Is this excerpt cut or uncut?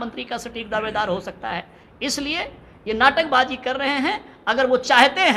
uncut